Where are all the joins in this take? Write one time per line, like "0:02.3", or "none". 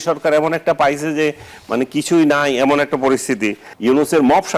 0:03.7